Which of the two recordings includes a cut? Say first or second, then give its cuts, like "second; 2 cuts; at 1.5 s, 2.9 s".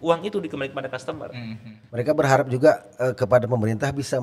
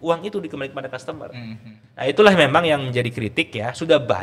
first; 1 cut; at 1.8 s